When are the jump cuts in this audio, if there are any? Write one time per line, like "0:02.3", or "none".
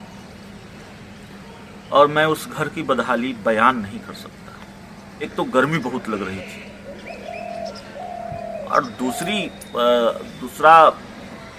0:05.3